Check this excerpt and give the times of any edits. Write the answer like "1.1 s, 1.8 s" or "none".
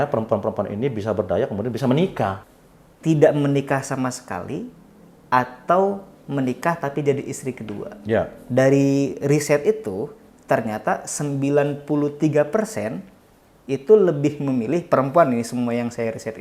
2.4 s